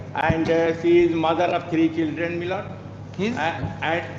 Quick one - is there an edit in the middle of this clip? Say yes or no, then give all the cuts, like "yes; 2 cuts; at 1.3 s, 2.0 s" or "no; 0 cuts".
no; 0 cuts